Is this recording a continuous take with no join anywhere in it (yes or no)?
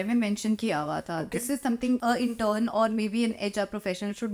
yes